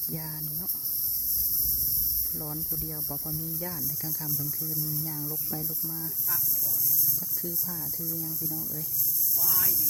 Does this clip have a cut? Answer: no; 0 cuts

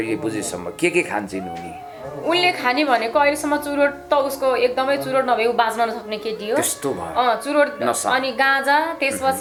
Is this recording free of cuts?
yes; 0 cuts

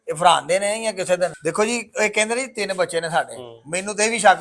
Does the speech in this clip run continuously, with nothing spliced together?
no; 1 cut; at 1.4 s

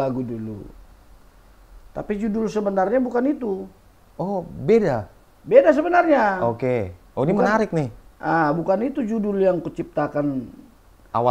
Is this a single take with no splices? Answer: yes; 0 cuts

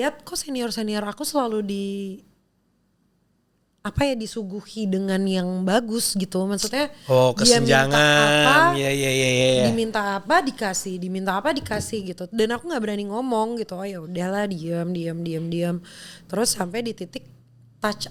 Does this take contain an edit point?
no; 0 cuts

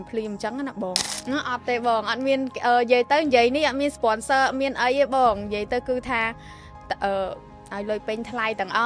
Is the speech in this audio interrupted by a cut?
yes; 1 cut; at 1.1 s

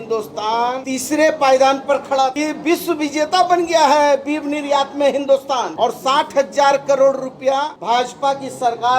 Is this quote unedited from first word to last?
no; 1 cut; at 2.4 s

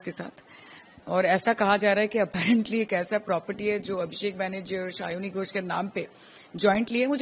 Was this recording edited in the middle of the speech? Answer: no; 0 cuts

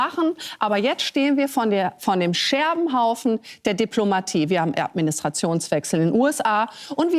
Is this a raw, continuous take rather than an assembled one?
yes; 0 cuts

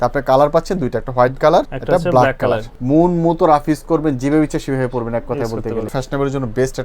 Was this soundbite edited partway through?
yes; 3 cuts; at 1.8 s, 2.7 s, 6.0 s

